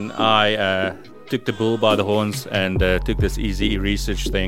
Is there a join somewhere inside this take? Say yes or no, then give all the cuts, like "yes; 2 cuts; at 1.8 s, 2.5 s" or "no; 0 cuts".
no; 0 cuts